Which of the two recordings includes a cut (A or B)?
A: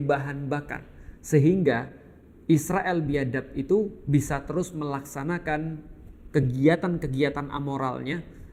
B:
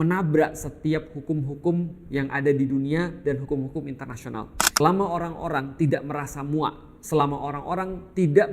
B